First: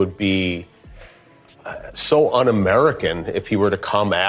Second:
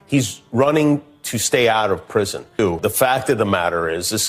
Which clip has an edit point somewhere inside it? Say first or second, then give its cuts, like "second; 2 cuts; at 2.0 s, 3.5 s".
second; 1 cut; at 2.4 s